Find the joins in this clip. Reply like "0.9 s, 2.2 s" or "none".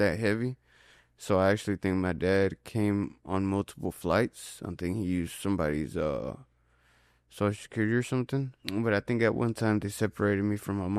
8.6 s